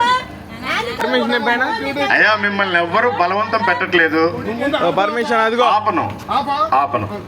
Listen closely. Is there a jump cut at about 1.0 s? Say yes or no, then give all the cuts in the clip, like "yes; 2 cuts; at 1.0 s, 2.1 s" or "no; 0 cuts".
yes; 1 cut; at 1.0 s